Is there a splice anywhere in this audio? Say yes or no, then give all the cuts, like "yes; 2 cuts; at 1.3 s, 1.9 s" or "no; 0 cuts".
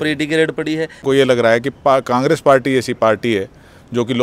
yes; 1 cut; at 1.0 s